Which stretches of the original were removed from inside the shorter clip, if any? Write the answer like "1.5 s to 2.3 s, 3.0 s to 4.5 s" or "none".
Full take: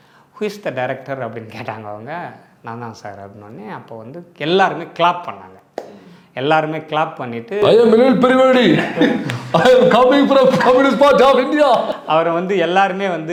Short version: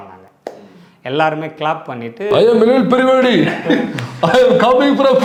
none